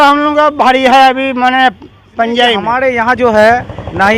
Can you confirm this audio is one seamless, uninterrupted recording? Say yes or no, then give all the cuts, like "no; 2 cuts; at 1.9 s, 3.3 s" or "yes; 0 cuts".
no; 1 cut; at 2.7 s